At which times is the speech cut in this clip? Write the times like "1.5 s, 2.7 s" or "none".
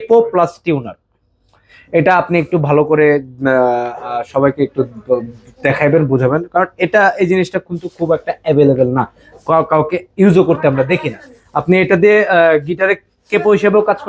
none